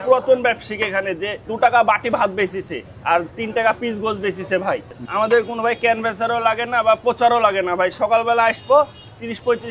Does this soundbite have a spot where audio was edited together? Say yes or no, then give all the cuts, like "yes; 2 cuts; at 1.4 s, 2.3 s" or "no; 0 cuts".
no; 0 cuts